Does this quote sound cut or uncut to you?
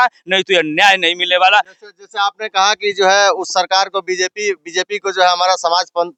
uncut